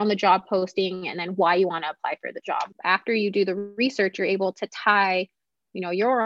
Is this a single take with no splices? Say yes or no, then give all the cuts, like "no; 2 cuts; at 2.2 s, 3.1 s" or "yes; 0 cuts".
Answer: no; 1 cut; at 2.8 s